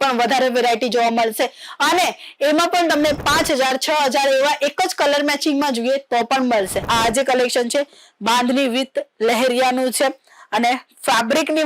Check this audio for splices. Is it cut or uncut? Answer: cut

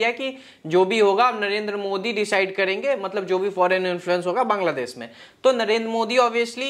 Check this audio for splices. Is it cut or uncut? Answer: uncut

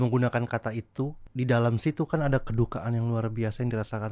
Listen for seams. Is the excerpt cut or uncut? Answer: cut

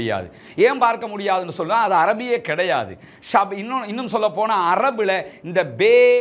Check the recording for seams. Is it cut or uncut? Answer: uncut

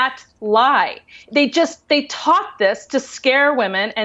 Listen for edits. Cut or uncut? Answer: uncut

